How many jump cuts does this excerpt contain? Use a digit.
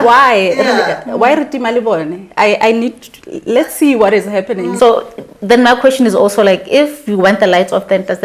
1